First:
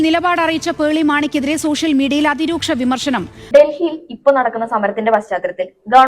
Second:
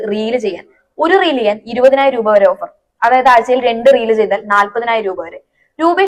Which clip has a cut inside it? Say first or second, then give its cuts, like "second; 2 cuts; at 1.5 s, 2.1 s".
first; 1 cut; at 3.3 s